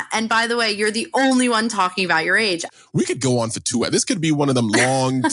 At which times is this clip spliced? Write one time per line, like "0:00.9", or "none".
0:02.7